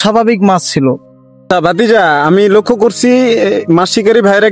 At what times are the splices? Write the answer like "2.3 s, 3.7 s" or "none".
1.5 s